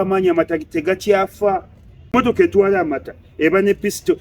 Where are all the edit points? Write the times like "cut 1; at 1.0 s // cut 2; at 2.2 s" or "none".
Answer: cut 1; at 2.1 s